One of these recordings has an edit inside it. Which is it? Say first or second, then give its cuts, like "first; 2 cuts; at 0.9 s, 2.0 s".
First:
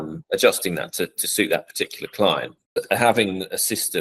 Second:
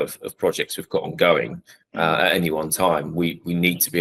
first; 1 cut; at 2.6 s